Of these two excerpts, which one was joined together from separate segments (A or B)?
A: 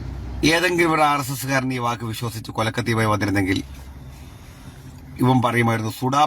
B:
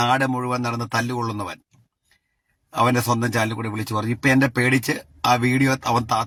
A